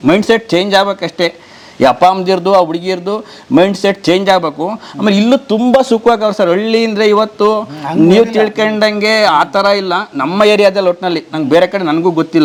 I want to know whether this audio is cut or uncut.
uncut